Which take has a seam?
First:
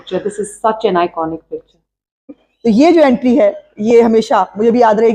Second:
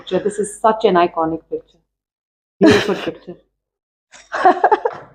first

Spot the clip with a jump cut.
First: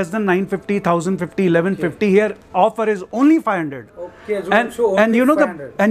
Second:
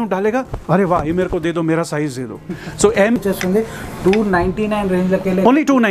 second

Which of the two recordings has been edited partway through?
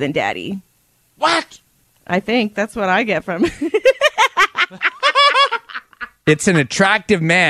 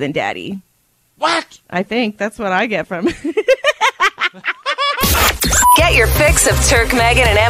second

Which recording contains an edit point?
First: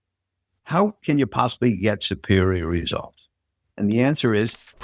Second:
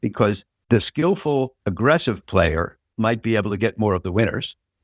second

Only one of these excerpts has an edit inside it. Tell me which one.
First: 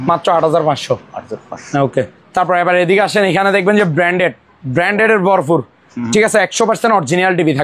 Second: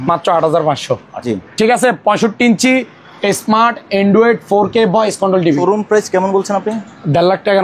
second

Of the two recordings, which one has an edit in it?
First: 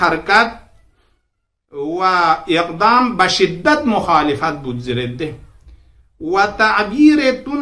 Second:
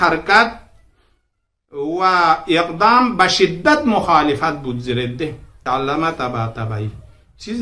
second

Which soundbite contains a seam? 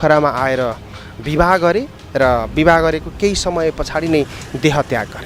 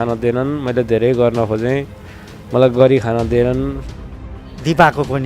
second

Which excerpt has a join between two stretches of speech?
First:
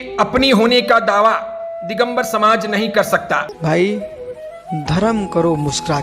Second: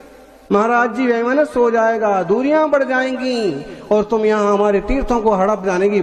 first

